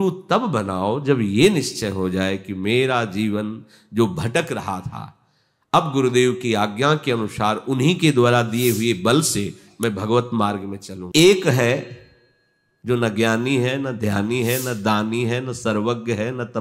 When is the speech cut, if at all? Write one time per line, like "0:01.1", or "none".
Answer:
0:11.0